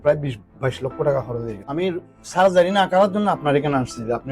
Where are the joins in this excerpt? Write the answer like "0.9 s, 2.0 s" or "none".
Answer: 1.5 s